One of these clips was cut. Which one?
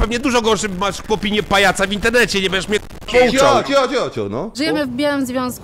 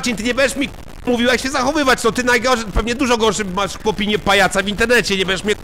first; 1 cut; at 4.6 s

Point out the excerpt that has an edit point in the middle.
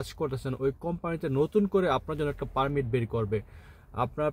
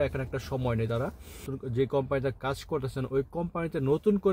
second; 1 cut; at 1.6 s

